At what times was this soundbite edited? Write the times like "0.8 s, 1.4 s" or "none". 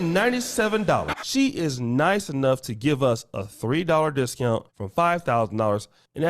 4.8 s